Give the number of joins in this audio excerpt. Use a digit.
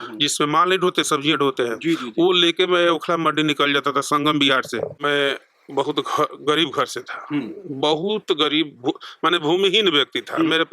1